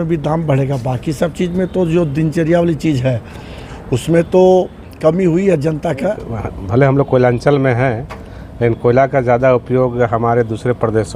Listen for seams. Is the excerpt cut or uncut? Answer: cut